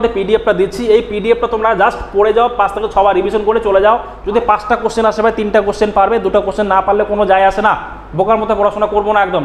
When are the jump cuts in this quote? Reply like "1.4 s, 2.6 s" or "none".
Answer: 4.1 s